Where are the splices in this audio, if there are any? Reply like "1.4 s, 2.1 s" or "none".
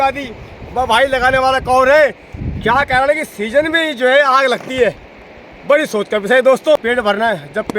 6.8 s